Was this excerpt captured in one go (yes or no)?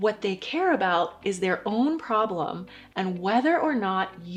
yes